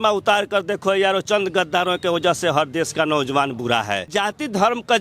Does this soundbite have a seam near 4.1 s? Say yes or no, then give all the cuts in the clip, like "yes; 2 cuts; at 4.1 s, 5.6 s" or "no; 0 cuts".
yes; 1 cut; at 4.1 s